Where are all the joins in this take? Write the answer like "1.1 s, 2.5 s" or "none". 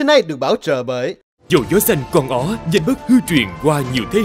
1.3 s